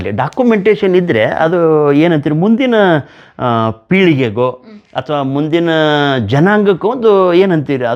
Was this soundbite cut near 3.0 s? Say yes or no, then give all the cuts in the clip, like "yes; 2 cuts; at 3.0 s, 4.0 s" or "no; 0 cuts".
no; 0 cuts